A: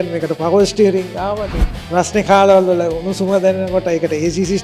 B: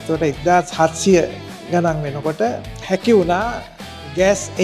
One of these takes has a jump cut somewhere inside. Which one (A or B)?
A